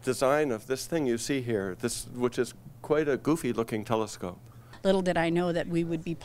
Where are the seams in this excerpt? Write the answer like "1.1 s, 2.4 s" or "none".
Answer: 4.7 s